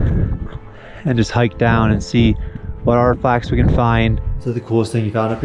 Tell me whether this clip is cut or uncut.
cut